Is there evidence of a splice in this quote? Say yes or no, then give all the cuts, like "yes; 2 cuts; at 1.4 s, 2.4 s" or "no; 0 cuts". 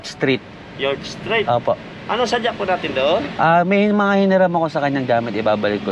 no; 0 cuts